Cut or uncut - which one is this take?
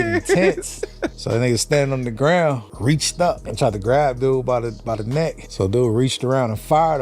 cut